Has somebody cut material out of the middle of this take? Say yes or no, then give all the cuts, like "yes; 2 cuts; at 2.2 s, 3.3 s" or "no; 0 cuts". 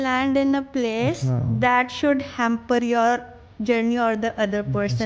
no; 0 cuts